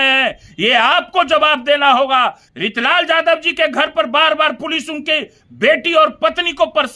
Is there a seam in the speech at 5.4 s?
no; 1 cut; at 2.5 s

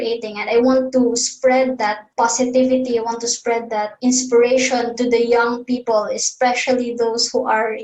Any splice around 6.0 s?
no; 2 cuts; at 2.0 s, 3.9 s

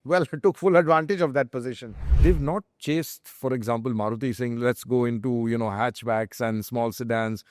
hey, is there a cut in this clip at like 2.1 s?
yes; 1 cut; at 2.1 s

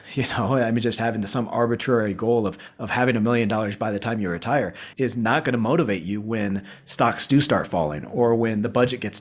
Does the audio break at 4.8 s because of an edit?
no; 0 cuts

